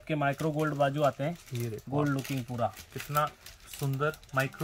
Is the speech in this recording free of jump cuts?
yes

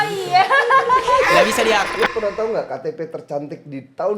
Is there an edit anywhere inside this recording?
yes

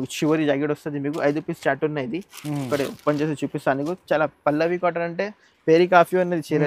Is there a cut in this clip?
no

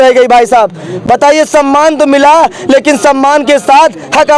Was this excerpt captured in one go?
yes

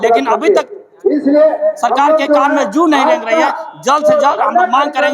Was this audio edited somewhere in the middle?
no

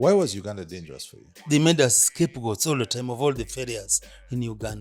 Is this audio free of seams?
no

